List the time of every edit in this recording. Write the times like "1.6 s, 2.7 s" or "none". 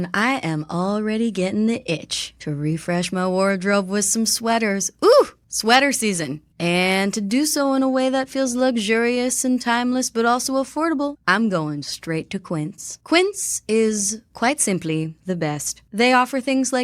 none